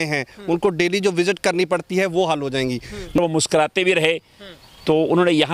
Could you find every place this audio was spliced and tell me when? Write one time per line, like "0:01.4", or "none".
0:03.2